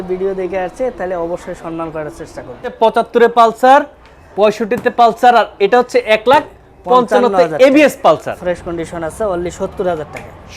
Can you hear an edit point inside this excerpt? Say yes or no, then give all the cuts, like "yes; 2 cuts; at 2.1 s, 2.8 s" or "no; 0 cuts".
yes; 2 cuts; at 2.8 s, 8.4 s